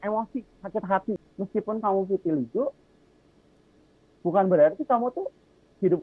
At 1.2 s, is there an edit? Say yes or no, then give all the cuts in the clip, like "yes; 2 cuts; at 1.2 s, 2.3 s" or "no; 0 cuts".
yes; 1 cut; at 1.2 s